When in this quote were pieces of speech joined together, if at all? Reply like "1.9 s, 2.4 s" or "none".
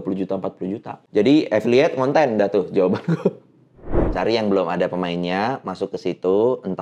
0.9 s, 4.0 s